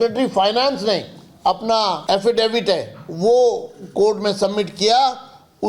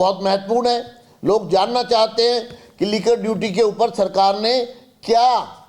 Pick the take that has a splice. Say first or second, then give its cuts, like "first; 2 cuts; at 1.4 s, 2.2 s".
first; 1 cut; at 2.0 s